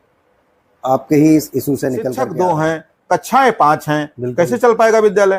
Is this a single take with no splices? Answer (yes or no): no